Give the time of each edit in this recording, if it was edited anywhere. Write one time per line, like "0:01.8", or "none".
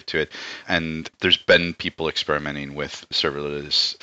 0:01.1
0:03.1